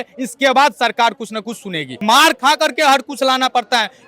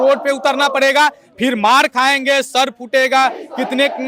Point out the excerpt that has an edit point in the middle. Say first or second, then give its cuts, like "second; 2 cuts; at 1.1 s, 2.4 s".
first; 1 cut; at 1.9 s